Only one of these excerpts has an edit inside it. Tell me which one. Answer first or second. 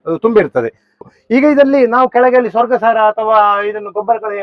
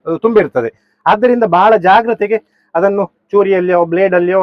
first